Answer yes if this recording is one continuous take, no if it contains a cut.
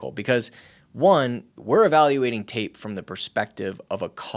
no